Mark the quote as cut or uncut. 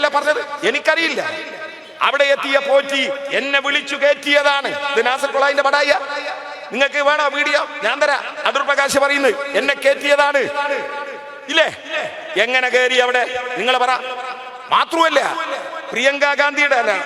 uncut